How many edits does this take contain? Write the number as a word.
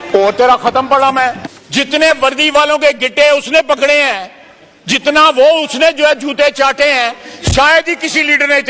one